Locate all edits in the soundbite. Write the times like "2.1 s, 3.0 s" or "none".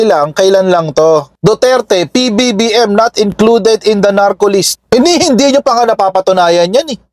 1.3 s, 4.8 s